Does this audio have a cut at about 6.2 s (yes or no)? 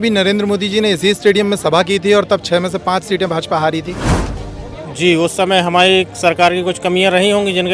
no